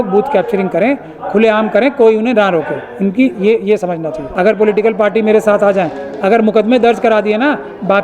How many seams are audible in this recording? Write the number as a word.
one